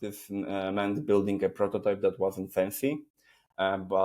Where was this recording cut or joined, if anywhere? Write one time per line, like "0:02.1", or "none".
none

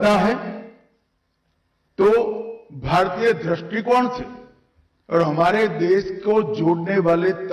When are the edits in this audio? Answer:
none

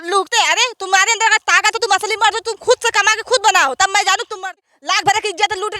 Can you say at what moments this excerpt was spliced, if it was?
0:04.3

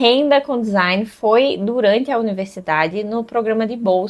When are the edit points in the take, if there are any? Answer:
none

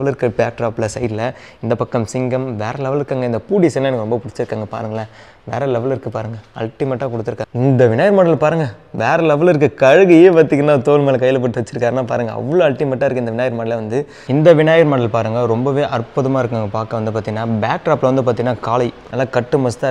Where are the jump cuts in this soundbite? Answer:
0:07.5
0:14.2
0:19.0

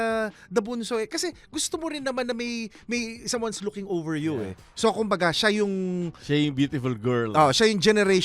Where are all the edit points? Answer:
0:04.6

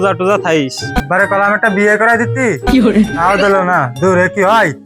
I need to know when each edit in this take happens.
0:01.0

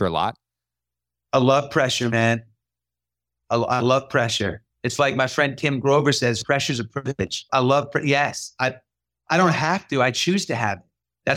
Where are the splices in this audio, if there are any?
0:07.4

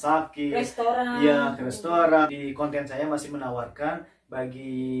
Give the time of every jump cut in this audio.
0:02.3

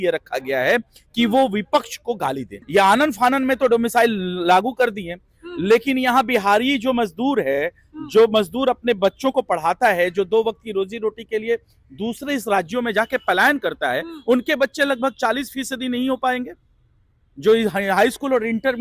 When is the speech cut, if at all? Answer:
0:02.5

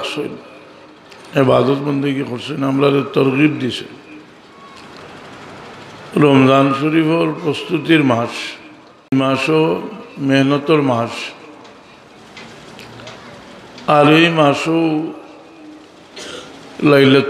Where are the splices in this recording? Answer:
0:09.1

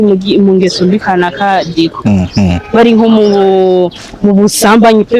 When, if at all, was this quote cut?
none

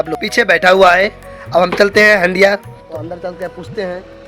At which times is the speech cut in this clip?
0:02.7

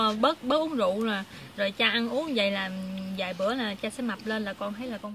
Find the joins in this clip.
none

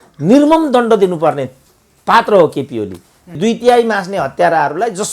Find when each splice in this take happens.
0:03.4

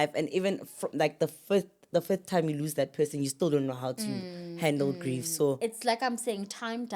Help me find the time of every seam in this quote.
0:05.6

